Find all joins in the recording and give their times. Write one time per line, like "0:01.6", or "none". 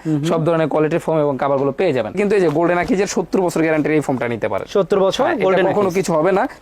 0:02.2